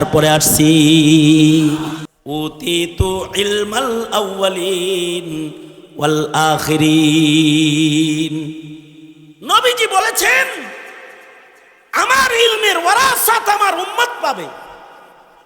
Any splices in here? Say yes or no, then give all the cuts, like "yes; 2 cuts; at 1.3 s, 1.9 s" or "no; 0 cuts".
yes; 1 cut; at 2.1 s